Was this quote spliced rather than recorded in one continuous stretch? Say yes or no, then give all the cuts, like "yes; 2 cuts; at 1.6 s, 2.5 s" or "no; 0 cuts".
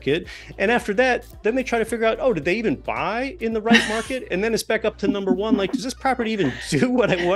no; 0 cuts